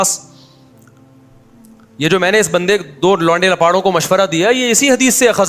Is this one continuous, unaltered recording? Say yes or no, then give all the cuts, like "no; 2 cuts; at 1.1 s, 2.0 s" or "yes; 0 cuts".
yes; 0 cuts